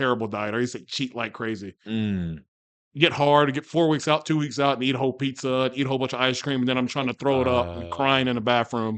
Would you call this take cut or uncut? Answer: uncut